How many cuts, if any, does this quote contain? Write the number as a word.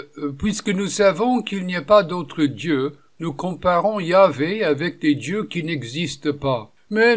zero